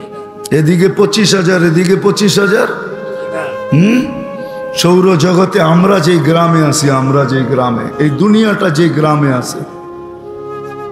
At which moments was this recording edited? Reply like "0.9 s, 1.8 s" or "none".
none